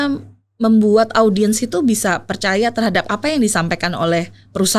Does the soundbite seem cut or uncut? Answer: uncut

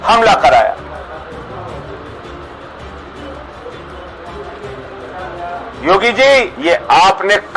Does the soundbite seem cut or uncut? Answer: cut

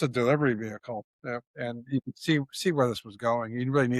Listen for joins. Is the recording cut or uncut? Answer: uncut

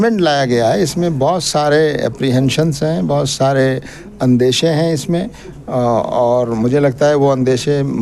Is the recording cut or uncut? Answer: uncut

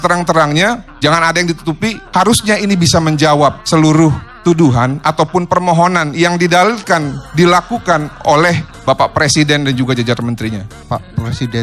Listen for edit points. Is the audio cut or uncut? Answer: cut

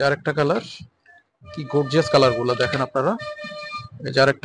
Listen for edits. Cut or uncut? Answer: uncut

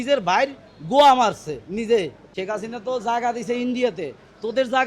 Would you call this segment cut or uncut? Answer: cut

